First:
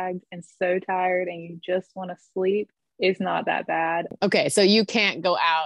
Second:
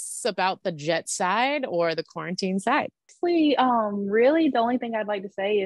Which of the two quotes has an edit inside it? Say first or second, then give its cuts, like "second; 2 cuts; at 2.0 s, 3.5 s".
first; 2 cuts; at 2.8 s, 4.1 s